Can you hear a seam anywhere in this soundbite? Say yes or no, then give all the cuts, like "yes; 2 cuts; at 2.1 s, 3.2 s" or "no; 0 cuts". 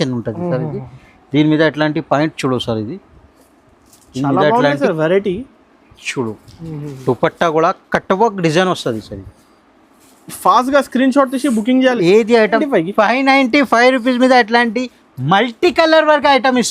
yes; 1 cut; at 12.6 s